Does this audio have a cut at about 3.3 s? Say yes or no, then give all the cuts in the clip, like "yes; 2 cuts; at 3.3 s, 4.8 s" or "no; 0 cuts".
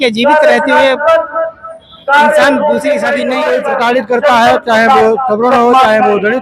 yes; 1 cut; at 3.3 s